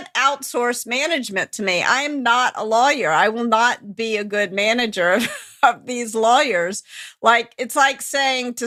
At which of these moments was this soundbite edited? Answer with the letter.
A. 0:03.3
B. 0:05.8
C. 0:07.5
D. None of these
D